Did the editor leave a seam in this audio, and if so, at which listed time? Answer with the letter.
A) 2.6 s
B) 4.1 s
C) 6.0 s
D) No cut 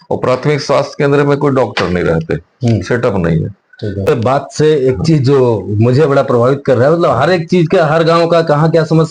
B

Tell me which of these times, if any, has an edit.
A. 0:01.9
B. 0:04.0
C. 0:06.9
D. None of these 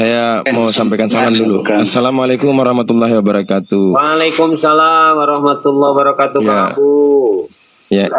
D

